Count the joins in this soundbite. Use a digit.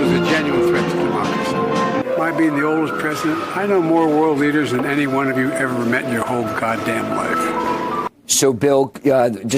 1